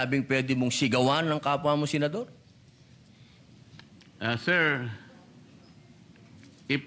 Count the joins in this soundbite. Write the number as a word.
one